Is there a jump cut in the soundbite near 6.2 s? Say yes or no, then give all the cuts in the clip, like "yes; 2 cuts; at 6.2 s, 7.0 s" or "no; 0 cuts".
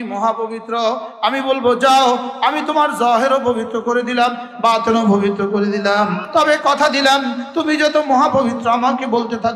yes; 1 cut; at 6.2 s